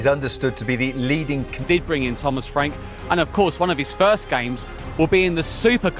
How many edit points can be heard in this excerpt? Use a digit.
1